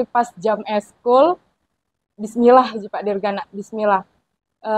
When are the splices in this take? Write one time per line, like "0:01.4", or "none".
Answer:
none

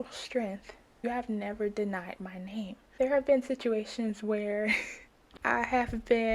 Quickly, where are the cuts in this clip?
0:01.0
0:02.8

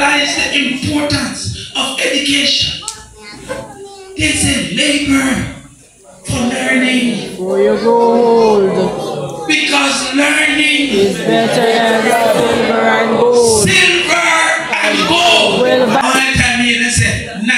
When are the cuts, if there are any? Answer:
0:16.0

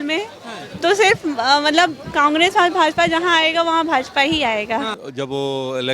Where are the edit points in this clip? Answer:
0:05.0

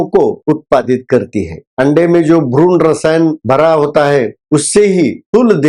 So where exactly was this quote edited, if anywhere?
none

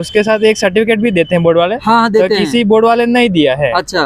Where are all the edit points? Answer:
none

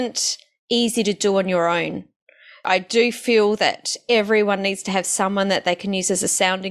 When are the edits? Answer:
0:02.6

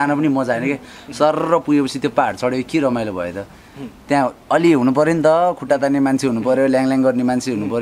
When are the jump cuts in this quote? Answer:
none

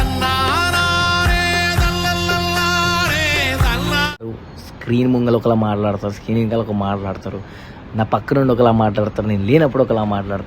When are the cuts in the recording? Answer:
0:04.3

